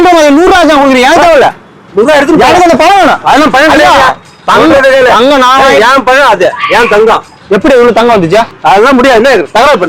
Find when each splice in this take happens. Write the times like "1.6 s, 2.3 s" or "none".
8.5 s